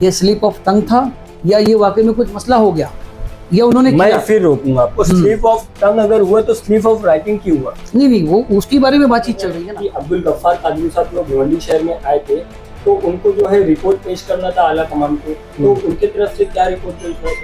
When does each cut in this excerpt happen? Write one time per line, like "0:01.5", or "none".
0:09.6